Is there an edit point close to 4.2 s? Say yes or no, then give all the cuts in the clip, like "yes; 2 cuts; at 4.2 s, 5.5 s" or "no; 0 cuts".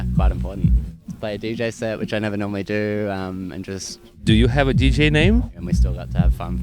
yes; 3 cuts; at 0.9 s, 4.2 s, 5.5 s